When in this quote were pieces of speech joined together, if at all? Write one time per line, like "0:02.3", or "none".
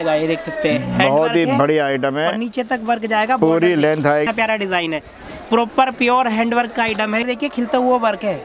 0:04.3
0:07.2